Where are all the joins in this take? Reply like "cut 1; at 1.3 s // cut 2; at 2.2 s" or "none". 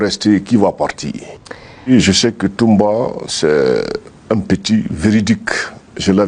cut 1; at 1.9 s